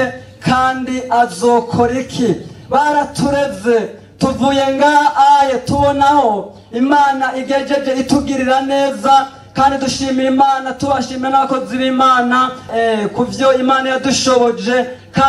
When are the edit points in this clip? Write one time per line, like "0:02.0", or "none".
0:12.7